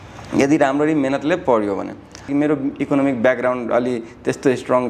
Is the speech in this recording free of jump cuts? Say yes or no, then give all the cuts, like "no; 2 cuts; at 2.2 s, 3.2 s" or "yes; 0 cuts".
no; 1 cut; at 2.2 s